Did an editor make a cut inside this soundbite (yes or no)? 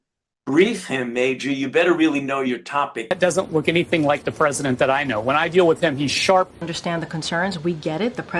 yes